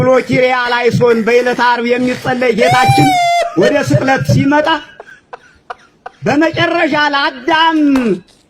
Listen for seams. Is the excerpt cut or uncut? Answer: uncut